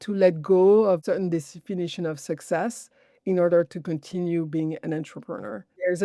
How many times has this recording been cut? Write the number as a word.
one